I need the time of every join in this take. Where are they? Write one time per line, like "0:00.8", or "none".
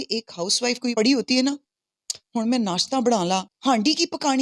0:00.9
0:03.5